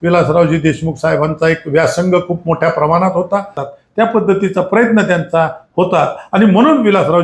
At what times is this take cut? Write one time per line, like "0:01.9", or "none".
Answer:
0:03.6